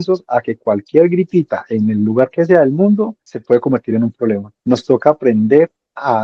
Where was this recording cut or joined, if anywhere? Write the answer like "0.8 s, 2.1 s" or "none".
3.3 s, 4.5 s